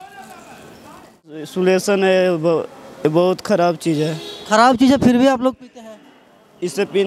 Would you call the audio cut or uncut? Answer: cut